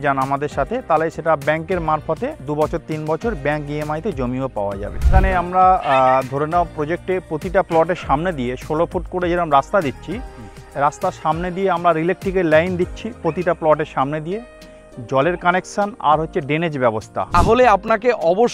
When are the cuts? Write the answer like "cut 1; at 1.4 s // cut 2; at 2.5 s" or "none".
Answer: cut 1; at 2.4 s // cut 2; at 5.1 s // cut 3; at 17.4 s